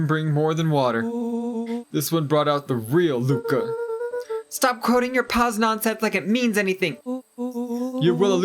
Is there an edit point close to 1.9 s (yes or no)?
no